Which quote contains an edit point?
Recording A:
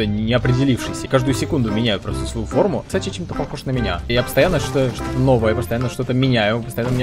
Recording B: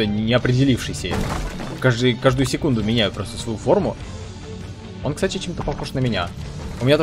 A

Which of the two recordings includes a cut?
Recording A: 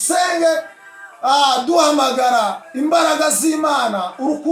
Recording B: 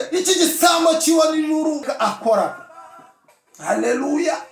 B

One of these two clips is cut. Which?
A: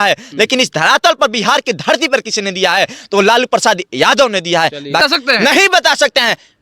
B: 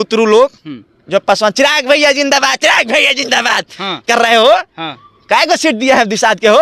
A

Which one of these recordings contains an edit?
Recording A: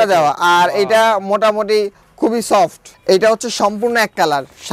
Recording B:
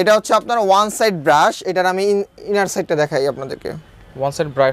A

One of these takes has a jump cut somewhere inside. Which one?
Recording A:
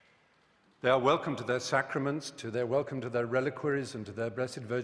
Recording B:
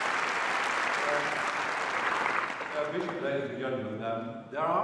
A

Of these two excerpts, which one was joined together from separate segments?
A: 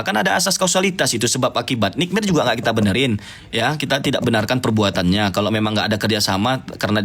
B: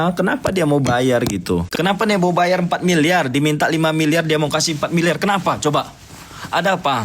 B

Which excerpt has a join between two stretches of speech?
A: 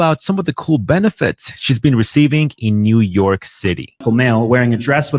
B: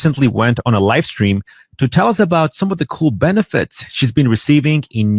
A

